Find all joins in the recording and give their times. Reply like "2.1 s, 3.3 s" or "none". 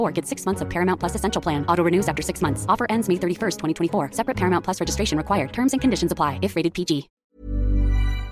7.1 s